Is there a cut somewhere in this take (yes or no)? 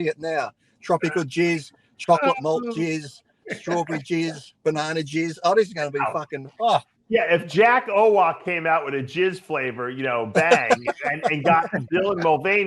no